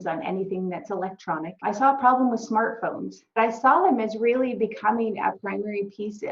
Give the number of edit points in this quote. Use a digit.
2